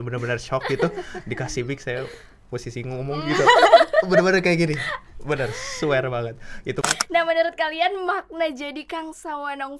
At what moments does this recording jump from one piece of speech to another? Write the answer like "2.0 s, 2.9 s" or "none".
6.8 s